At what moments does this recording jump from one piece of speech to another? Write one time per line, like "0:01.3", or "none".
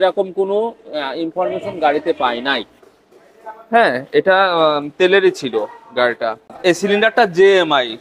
0:06.6